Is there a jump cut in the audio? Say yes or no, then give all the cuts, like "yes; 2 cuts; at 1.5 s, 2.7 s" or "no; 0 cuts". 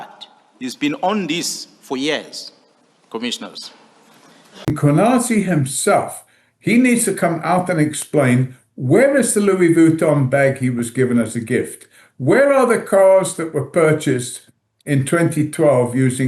yes; 1 cut; at 4.8 s